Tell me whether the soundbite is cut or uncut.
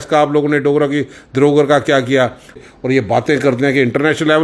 cut